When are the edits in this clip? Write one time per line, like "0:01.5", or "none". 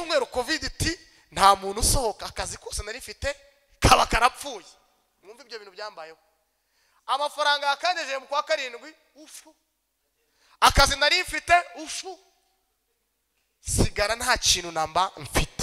none